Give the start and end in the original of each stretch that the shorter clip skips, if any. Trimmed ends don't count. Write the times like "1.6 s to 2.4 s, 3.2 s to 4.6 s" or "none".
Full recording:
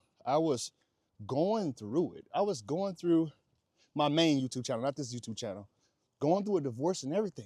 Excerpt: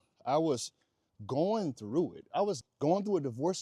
2.6 s to 6.0 s